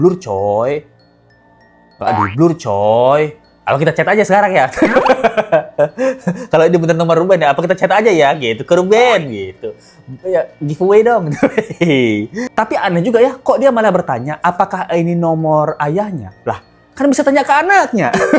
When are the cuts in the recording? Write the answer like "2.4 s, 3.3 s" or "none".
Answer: none